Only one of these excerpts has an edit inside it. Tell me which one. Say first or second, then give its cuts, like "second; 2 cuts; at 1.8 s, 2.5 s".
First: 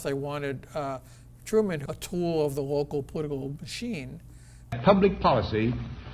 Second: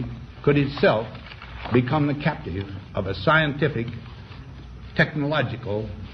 first; 2 cuts; at 1.8 s, 4.8 s